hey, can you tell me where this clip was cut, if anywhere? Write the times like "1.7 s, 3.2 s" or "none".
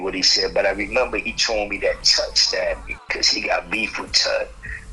3.1 s